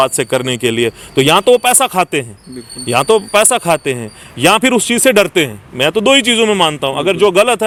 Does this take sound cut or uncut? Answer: uncut